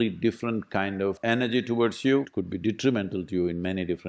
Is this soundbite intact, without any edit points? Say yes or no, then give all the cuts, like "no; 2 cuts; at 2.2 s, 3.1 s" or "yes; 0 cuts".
no; 1 cut; at 2.3 s